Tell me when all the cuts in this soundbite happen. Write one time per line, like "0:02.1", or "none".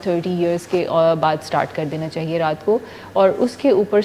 none